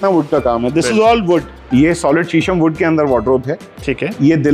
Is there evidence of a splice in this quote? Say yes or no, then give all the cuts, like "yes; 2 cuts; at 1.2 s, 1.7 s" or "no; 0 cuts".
yes; 1 cut; at 1.6 s